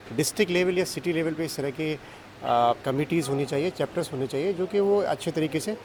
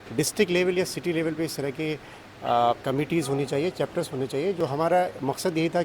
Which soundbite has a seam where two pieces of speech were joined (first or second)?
second